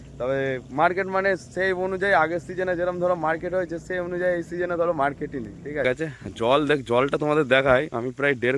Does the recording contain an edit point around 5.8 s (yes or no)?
yes